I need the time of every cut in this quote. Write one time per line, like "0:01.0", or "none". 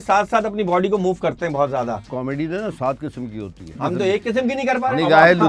0:02.1
0:03.8